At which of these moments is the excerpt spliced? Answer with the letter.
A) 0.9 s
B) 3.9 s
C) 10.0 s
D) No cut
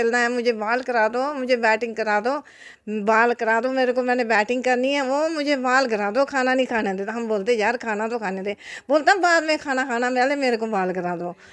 D